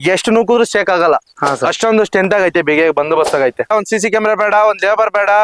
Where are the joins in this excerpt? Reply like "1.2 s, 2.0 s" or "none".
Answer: 3.7 s